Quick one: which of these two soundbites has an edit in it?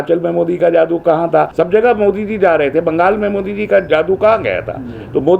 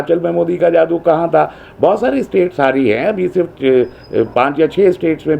first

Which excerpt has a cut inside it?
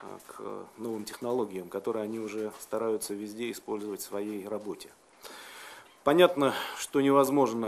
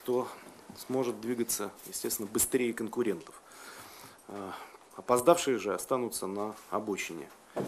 first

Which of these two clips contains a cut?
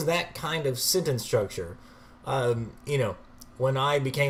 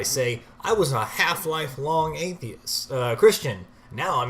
second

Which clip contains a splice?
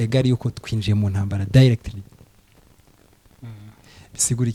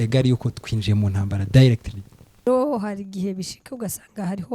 second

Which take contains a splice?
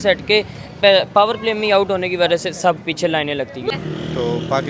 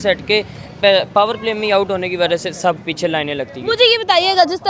first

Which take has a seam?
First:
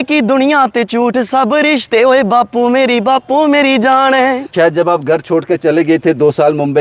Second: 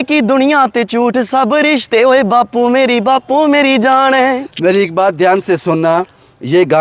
first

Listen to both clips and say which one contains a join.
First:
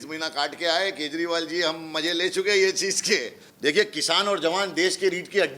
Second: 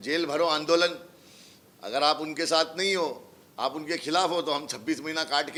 first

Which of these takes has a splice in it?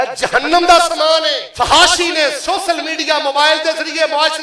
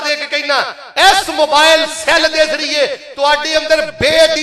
first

